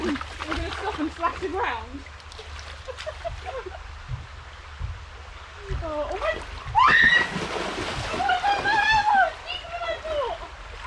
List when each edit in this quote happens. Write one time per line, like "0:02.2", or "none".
none